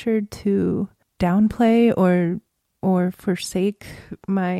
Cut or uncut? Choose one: uncut